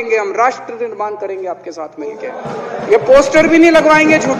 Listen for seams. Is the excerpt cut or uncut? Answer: uncut